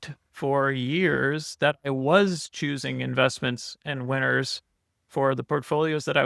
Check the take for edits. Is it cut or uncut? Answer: uncut